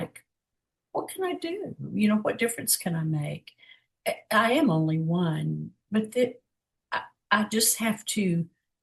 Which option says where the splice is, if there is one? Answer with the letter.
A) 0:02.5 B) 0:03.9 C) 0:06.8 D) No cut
B